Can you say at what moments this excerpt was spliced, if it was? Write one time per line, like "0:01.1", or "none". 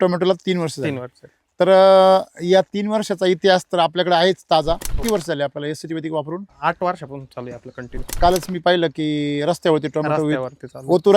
0:04.9
0:06.5
0:08.2